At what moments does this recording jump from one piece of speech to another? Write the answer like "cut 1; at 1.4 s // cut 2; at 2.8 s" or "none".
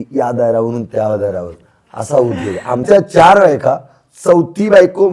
cut 1; at 2.8 s